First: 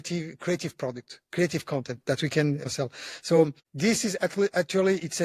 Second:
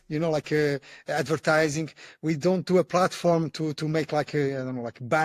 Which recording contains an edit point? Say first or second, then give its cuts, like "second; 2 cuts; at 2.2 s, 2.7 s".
first; 2 cuts; at 2.7 s, 3.6 s